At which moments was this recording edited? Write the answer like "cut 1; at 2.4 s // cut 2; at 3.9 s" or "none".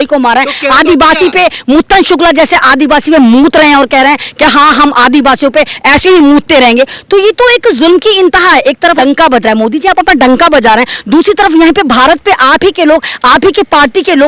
cut 1; at 9.0 s